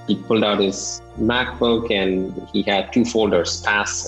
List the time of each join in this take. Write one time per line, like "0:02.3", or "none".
0:01.0